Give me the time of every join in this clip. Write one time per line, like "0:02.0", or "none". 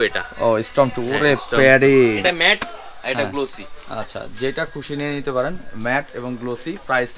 0:02.2